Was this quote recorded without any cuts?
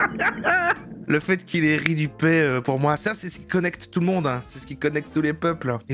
yes; 0 cuts

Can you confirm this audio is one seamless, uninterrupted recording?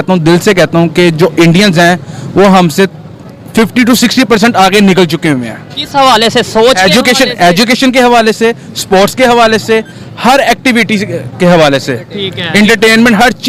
yes; 0 cuts

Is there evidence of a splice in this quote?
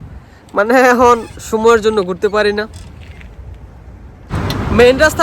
yes; 1 cut; at 4.3 s

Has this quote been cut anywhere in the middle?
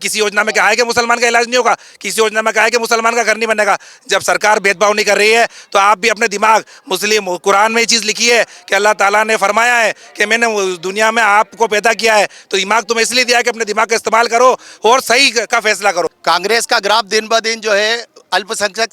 yes; 1 cut; at 16.2 s

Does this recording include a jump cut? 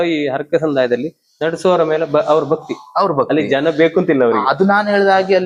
no; 0 cuts

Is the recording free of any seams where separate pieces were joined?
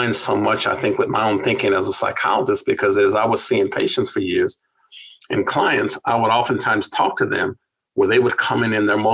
yes; 0 cuts

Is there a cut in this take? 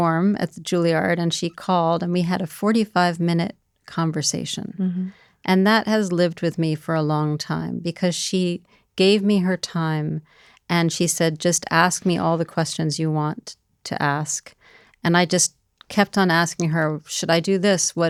no; 0 cuts

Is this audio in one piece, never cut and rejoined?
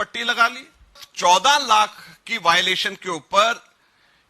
no; 1 cut; at 1.1 s

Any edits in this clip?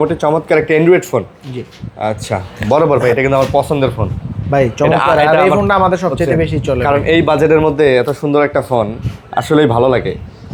no; 0 cuts

